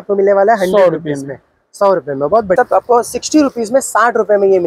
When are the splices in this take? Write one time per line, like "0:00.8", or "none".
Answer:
0:02.6